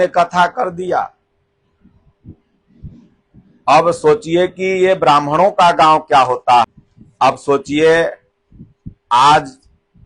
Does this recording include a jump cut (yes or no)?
yes